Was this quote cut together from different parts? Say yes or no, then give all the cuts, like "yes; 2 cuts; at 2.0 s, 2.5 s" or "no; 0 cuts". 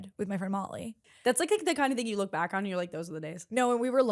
yes; 1 cut; at 1.1 s